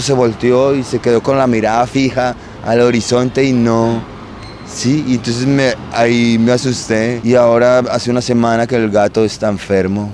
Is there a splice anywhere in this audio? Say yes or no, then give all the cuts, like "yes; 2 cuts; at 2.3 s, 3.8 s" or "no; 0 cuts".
no; 0 cuts